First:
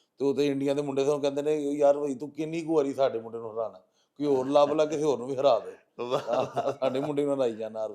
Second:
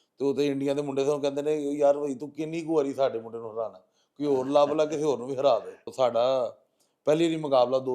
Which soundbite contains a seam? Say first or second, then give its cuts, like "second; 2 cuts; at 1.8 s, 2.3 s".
second; 1 cut; at 5.9 s